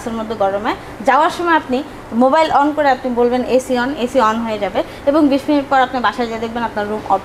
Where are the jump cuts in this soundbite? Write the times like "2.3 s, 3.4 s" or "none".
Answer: none